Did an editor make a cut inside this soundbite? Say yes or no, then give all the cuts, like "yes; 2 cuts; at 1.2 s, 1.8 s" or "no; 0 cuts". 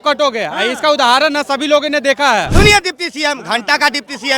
yes; 1 cut; at 2.5 s